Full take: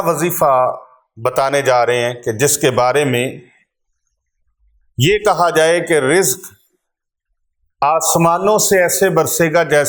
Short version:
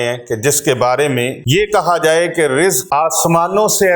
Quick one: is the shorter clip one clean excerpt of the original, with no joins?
no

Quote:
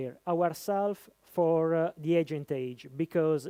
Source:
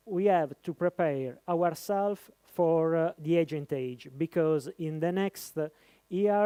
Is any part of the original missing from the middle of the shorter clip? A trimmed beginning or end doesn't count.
no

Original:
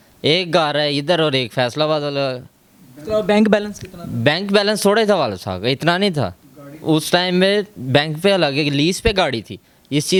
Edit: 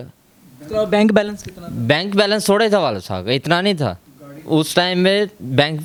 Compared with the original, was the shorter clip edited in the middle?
no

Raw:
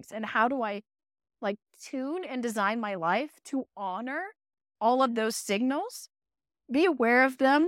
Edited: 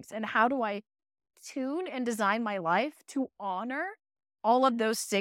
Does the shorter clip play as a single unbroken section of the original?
no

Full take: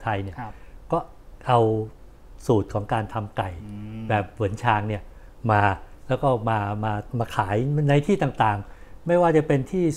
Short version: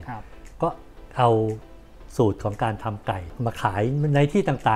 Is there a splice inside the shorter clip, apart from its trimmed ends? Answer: yes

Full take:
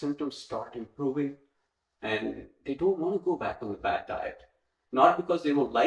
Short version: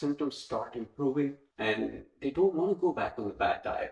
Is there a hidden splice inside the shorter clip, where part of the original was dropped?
yes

